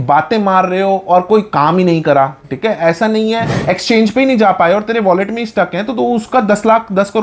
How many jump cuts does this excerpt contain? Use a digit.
1